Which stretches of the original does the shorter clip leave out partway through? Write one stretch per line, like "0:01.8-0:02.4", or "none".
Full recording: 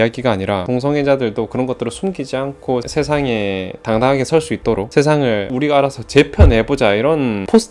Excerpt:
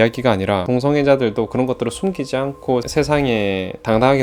none